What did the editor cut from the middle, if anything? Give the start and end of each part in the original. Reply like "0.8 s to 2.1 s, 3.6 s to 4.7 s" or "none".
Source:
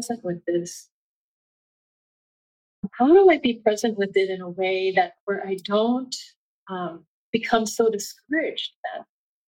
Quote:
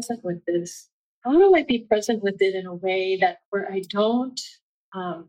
1.3 s to 3.0 s